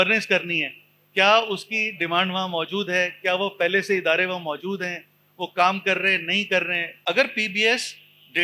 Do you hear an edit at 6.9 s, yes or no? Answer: yes